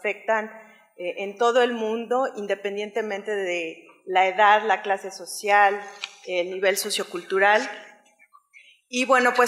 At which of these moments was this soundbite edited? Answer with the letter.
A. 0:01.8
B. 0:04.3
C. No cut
A